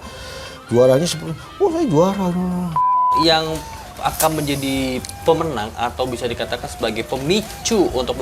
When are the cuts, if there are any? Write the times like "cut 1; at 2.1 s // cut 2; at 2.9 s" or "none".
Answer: cut 1; at 3.1 s